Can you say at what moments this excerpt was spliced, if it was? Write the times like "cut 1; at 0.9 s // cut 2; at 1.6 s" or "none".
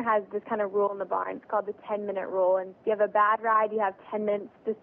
cut 1; at 2.7 s

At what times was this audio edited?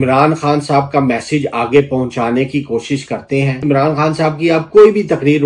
cut 1; at 3.6 s

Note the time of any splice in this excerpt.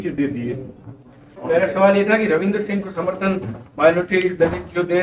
cut 1; at 1.3 s

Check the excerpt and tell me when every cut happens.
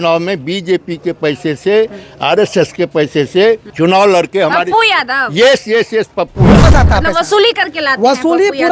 cut 1; at 3.7 s // cut 2; at 6.6 s

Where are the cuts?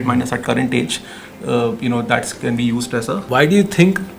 cut 1; at 3.2 s

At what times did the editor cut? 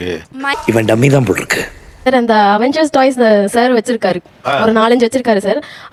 none

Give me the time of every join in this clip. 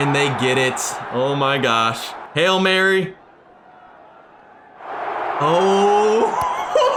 none

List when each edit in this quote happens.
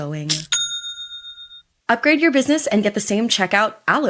cut 1; at 1.7 s

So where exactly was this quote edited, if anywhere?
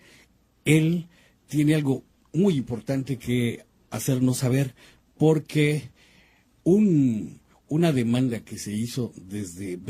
cut 1; at 2.0 s

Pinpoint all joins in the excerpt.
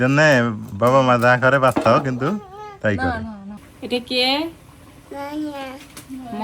cut 1; at 3.7 s

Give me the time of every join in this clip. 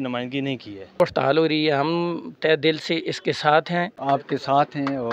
cut 1; at 1.0 s // cut 2; at 3.9 s

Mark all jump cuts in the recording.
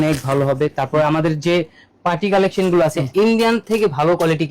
cut 1; at 3.1 s

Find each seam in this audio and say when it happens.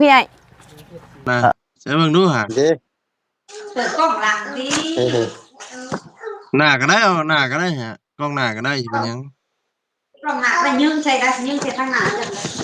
cut 1; at 1.5 s

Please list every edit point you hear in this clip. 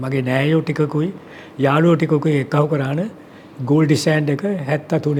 none

